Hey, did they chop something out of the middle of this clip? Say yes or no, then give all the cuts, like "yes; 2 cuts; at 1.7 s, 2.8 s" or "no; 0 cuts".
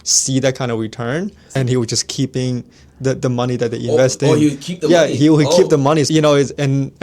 yes; 2 cuts; at 1.4 s, 6.1 s